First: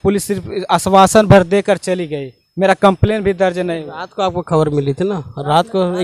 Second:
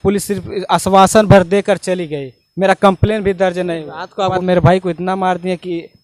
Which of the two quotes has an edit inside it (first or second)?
second